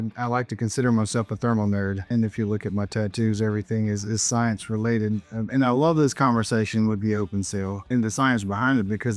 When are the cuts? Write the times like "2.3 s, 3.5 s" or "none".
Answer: 2.1 s, 7.9 s